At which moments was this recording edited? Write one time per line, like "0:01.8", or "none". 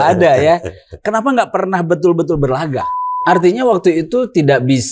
0:03.1